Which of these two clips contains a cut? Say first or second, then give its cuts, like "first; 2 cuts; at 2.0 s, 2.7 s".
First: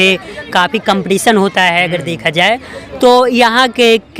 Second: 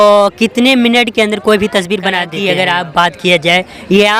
second; 1 cut; at 2.3 s